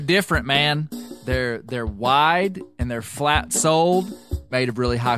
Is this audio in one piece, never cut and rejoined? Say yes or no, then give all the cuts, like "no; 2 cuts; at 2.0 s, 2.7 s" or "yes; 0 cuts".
yes; 0 cuts